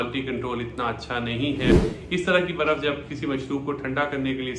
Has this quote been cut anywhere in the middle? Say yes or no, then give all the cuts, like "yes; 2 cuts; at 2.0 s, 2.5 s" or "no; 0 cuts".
yes; 1 cut; at 1.7 s